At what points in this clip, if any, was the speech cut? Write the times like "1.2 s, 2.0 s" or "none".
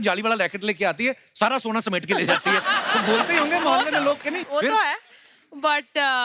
none